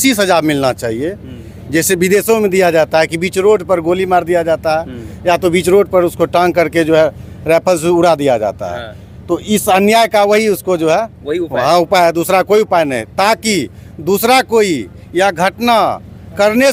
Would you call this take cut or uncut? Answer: uncut